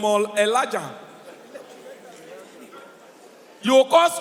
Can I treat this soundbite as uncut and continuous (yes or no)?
yes